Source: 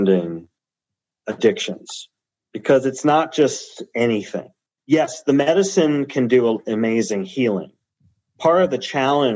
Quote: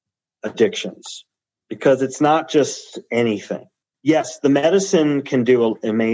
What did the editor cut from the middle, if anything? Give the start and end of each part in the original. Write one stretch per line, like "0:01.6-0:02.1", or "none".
none

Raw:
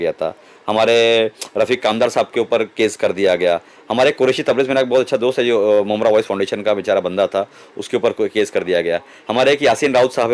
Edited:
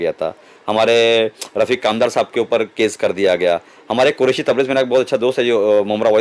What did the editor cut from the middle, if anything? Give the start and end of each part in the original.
none

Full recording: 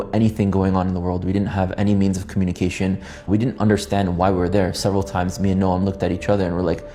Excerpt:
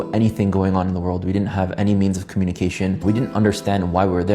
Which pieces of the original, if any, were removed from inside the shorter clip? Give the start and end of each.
0:03.0-0:03.2

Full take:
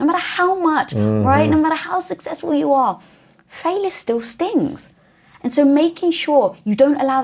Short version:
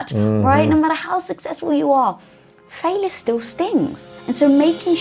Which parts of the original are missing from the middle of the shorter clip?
0:04.9-0:05.2

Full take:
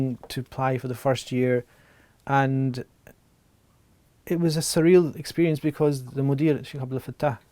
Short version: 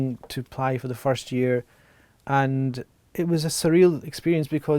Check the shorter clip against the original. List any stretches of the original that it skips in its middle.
0:02.9-0:04.1

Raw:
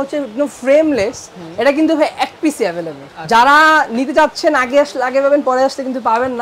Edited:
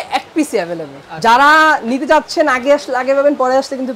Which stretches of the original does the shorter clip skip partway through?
none

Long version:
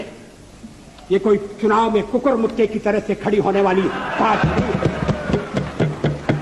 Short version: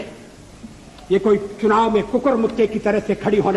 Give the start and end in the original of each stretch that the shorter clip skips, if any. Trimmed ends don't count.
none

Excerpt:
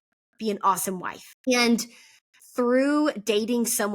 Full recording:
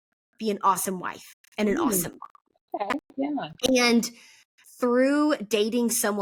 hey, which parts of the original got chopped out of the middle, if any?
0:01.5-0:03.7

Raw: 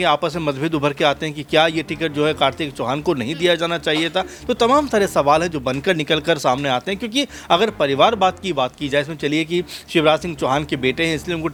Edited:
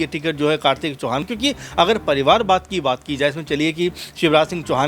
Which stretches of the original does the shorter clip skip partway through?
0:03.0-0:07.0

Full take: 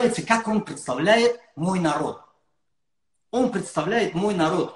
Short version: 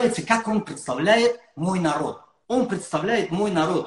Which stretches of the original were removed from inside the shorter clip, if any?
0:02.3-0:03.1

